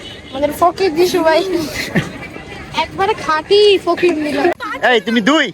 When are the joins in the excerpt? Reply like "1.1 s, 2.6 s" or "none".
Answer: 4.6 s